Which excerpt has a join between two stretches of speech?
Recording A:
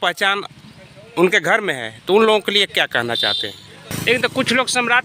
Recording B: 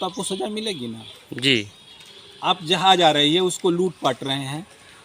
A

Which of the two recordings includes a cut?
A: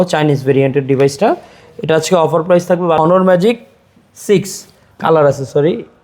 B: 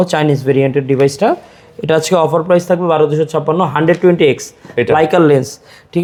A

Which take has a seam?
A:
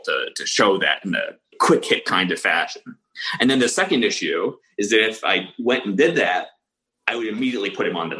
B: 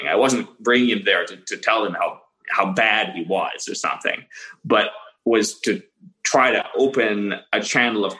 A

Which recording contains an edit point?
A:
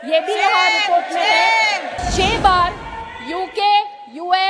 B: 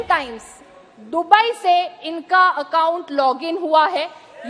A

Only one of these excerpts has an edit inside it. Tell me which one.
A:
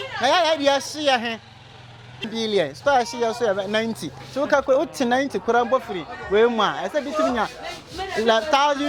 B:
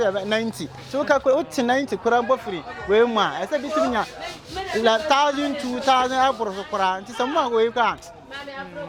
A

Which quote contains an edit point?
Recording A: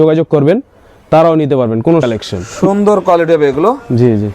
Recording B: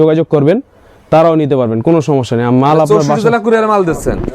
A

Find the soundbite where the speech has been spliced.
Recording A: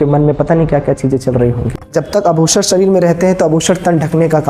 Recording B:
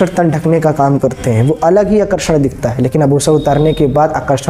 A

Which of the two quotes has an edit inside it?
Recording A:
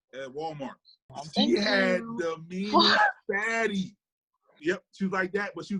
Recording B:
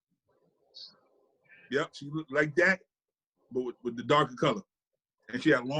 A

